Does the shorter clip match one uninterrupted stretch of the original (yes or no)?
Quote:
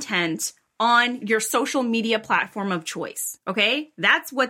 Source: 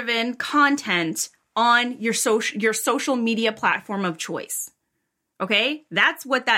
no